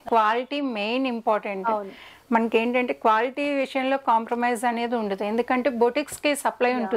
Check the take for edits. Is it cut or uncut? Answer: uncut